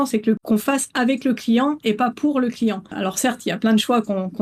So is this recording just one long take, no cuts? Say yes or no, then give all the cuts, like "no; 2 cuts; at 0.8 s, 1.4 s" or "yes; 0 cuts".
yes; 0 cuts